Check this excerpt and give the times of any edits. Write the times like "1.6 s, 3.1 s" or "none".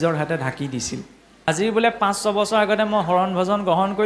1.2 s

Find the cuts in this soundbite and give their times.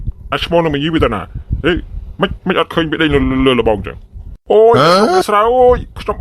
none

